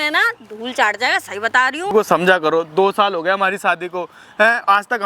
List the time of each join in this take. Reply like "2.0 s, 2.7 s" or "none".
1.9 s